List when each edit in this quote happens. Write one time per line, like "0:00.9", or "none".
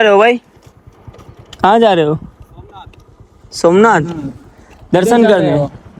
none